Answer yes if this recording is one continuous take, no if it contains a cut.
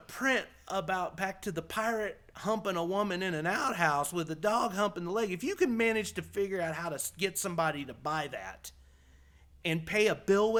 yes